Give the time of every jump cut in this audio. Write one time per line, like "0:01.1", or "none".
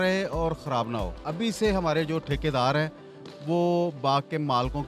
0:01.2

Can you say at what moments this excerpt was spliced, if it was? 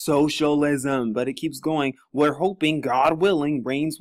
0:03.0

